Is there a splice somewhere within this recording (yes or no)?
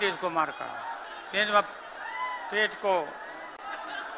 yes